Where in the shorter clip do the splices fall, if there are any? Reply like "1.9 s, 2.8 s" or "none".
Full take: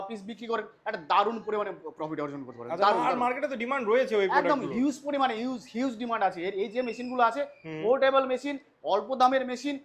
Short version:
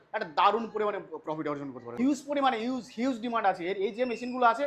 1.9 s